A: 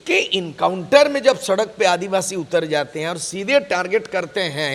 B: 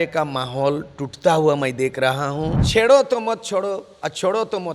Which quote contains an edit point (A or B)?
B